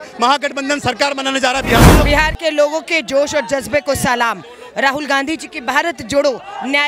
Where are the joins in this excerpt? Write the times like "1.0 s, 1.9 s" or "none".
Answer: 2.1 s